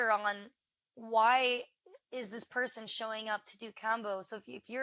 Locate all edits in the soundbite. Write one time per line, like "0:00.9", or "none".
none